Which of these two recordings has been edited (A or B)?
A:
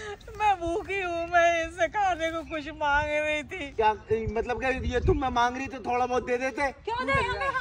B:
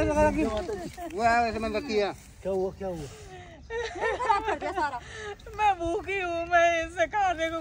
A